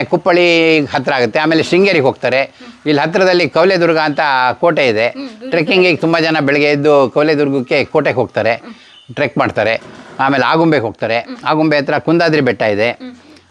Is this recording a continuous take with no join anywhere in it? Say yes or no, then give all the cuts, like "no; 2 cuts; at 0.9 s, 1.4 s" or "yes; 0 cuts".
yes; 0 cuts